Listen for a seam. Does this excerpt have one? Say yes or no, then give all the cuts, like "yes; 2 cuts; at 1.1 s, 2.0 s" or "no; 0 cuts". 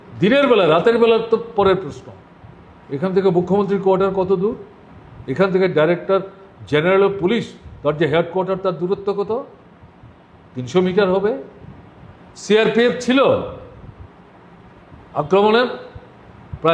no; 0 cuts